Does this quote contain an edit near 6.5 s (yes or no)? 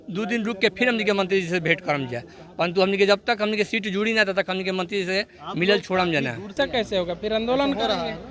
yes